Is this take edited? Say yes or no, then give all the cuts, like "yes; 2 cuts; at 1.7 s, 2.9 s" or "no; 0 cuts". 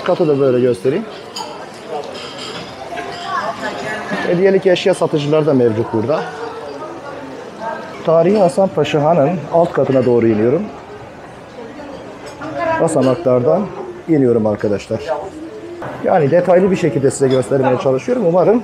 no; 0 cuts